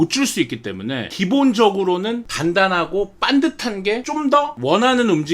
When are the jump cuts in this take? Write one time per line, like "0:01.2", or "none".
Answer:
none

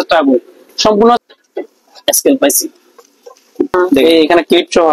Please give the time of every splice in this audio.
0:01.2
0:04.0

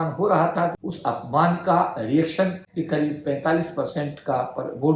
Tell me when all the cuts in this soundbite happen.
0:00.8
0:02.7

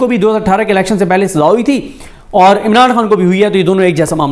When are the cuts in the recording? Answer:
none

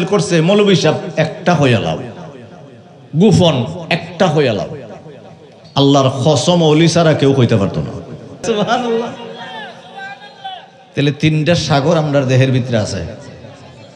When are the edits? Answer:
0:08.4

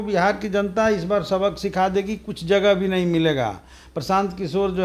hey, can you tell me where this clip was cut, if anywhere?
none

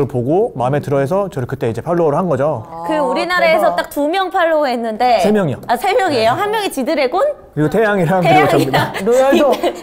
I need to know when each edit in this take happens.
none

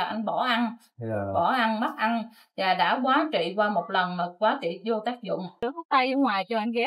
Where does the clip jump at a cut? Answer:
0:05.7

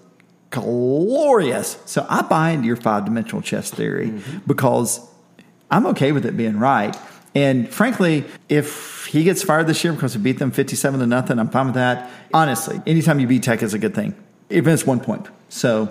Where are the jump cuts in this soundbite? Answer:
0:08.3
0:12.3
0:14.5

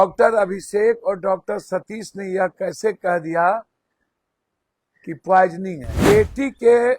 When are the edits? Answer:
0:06.0

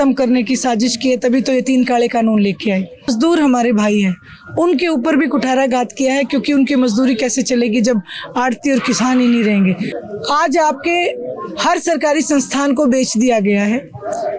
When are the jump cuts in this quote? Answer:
0:03.1
0:10.0

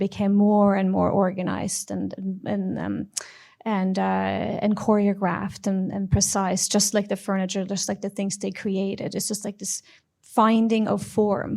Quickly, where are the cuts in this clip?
none

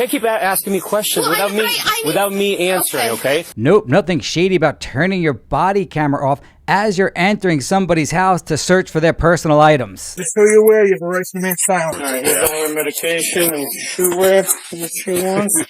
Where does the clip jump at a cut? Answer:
0:03.5
0:10.0
0:12.0

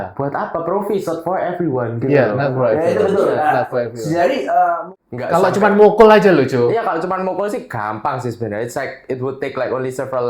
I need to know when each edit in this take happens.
0:04.8

